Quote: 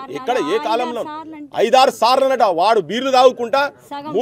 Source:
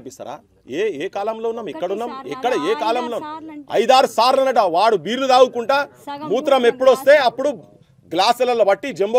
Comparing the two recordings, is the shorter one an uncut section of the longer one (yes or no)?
yes